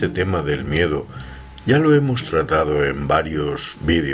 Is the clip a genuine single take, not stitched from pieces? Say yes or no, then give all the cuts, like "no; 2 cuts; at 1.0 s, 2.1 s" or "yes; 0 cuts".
yes; 0 cuts